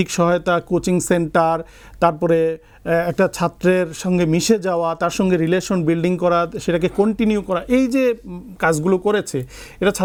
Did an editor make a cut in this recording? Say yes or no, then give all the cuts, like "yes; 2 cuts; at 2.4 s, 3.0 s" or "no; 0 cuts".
no; 0 cuts